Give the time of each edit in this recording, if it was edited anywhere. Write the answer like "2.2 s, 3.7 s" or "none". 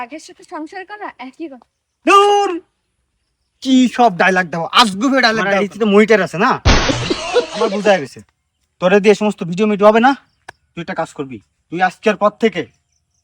5.4 s, 7.7 s